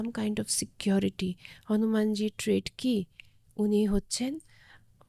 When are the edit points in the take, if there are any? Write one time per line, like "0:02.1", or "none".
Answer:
none